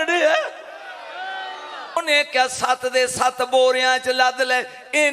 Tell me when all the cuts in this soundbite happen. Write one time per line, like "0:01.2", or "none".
0:02.0